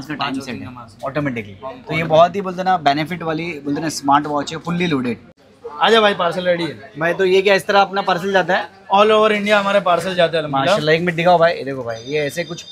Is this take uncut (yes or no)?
yes